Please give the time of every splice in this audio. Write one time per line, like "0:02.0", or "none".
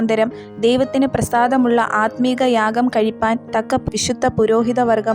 0:03.4